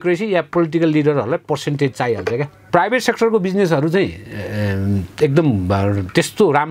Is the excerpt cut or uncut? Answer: cut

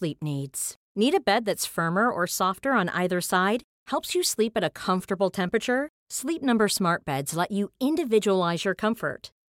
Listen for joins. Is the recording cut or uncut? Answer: uncut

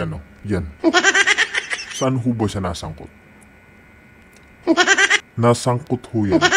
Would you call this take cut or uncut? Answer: cut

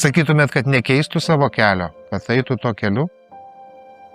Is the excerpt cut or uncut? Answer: cut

